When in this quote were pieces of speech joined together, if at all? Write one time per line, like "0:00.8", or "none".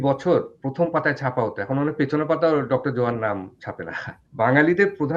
0:04.2

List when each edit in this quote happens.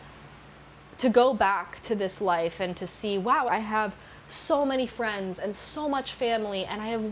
0:03.5

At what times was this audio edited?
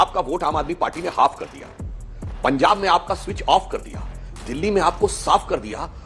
none

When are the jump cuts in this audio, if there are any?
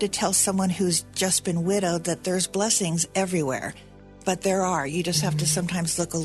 0:04.2

